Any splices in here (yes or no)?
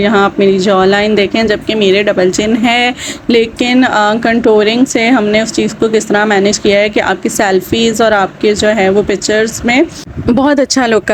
no